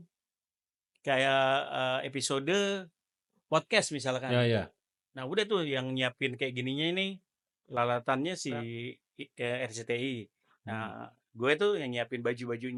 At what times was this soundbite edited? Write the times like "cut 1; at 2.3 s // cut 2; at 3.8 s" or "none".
none